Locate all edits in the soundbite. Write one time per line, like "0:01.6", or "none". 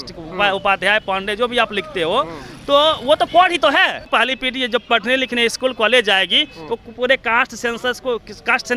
0:04.0